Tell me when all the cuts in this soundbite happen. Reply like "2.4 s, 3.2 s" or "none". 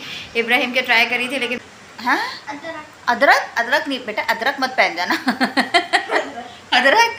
1.6 s, 5.3 s